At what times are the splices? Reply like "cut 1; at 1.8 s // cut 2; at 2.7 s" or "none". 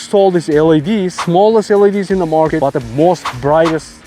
cut 1; at 1.1 s // cut 2; at 2.7 s